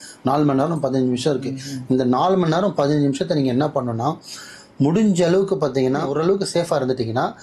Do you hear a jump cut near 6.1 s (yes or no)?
yes